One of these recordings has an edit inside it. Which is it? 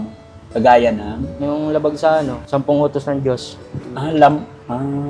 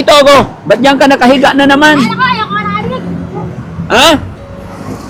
first; 2 cuts; at 1.3 s, 2.4 s

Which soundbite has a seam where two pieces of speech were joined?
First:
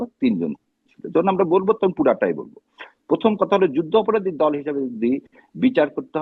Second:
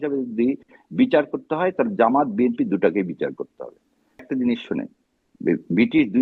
second; 1 cut; at 4.2 s

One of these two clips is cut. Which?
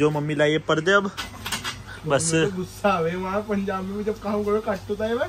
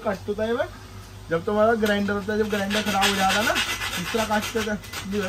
first; 1 cut; at 1.3 s

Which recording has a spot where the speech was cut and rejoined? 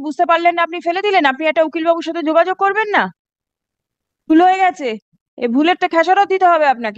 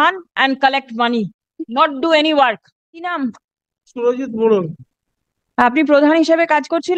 second; 1 cut; at 3.1 s

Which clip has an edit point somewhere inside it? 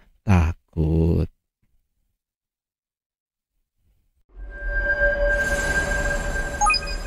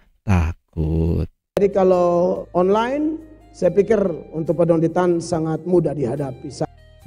second; 1 cut; at 1.6 s

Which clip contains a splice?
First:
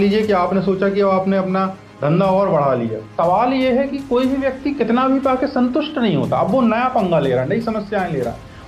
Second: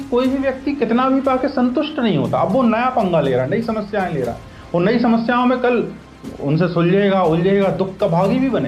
first; 1 cut; at 3.1 s

